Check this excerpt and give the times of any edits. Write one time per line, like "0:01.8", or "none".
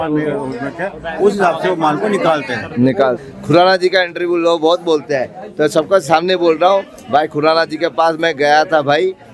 0:03.1